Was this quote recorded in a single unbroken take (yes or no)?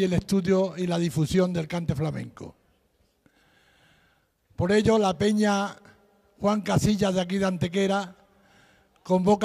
no